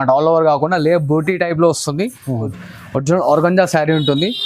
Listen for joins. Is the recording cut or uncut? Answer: cut